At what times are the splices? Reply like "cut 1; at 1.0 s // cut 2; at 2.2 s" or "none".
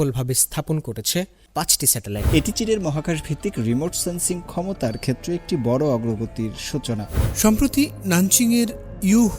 cut 1; at 2.2 s // cut 2; at 7.2 s